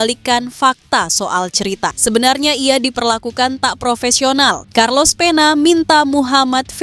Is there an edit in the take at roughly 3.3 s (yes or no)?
no